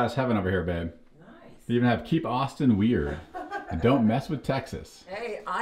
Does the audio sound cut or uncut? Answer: uncut